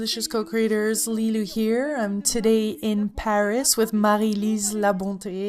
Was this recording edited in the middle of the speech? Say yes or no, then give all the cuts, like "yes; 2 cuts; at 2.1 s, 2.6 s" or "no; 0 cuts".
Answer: no; 0 cuts